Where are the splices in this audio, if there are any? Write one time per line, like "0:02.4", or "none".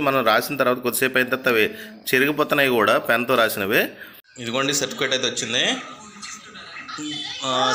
0:04.3